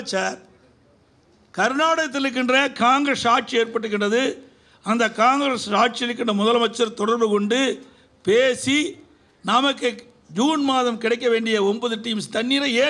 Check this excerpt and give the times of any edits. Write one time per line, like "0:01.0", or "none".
none